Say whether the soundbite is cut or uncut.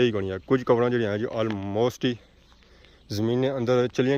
uncut